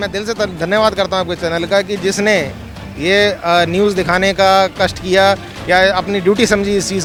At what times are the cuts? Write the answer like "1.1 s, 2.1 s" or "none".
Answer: none